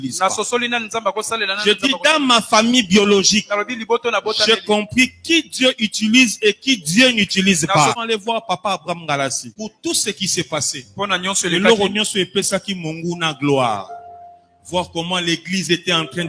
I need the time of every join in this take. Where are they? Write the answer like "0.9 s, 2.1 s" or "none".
8.0 s, 9.5 s